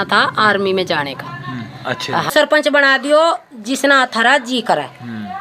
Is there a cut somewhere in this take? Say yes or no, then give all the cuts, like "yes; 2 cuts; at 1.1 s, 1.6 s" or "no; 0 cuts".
yes; 1 cut; at 2.3 s